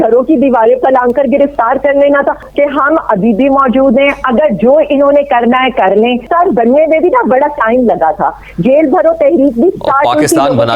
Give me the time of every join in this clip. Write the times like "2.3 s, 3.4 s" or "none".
2.5 s, 6.3 s